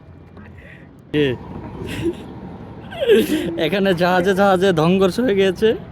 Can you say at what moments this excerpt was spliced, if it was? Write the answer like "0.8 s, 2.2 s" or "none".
1.1 s

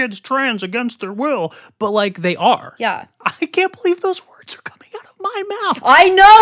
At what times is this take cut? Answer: 2.7 s

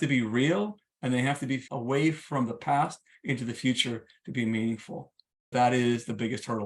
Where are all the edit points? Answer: 1.7 s, 5.5 s

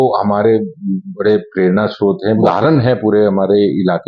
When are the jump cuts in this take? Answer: 2.4 s

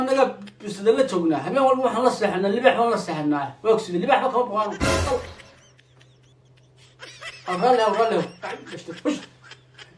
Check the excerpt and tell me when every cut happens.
none

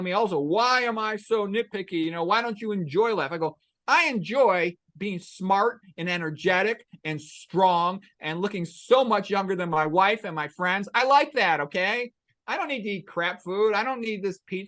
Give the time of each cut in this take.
none

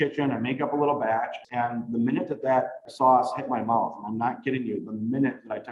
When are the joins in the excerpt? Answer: 1.4 s, 2.8 s

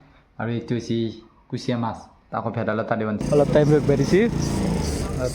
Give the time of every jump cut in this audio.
3.2 s

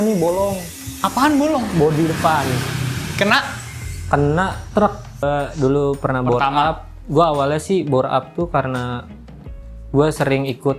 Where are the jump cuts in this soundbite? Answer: 5.2 s

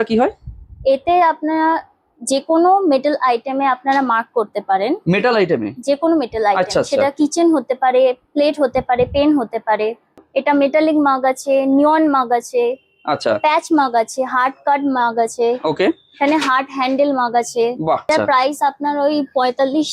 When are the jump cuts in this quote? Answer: 10.2 s, 18.1 s

